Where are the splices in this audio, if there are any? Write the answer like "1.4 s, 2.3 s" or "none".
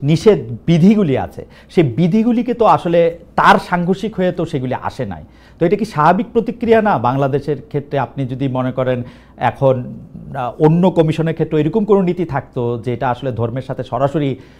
none